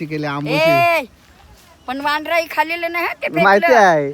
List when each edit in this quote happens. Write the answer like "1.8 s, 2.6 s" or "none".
none